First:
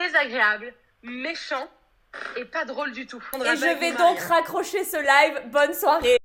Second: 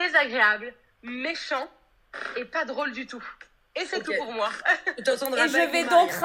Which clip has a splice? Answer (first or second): first